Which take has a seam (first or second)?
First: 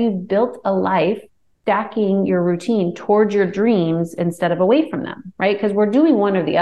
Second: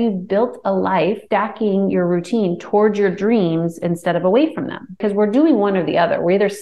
second